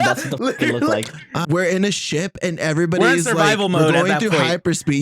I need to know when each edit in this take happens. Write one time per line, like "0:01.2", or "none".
0:01.4